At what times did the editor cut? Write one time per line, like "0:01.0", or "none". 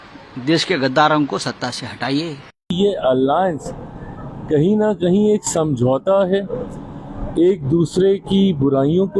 0:02.7